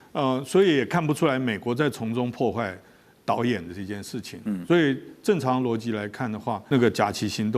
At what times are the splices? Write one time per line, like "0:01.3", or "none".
0:06.6

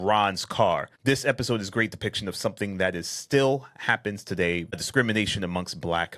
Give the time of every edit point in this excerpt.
0:00.9
0:04.8

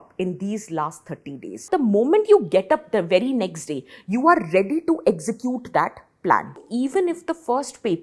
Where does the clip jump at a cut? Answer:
0:01.7
0:06.7

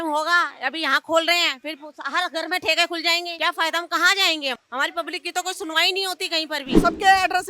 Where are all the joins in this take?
0:03.3
0:04.6
0:06.7

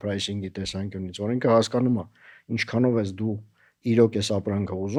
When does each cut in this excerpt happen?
none

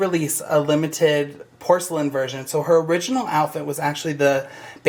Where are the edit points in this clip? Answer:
none

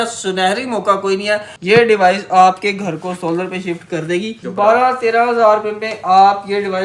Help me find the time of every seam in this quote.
0:01.5
0:04.4

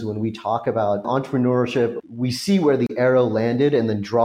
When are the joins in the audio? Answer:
0:01.0
0:02.0

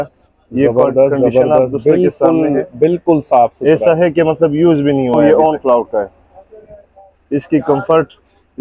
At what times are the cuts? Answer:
0:05.2

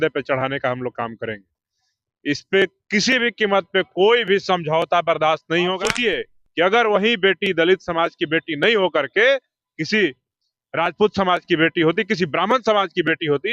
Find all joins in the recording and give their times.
0:05.9

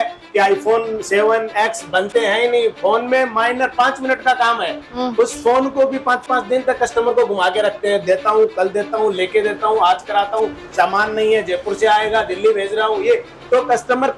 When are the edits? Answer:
none

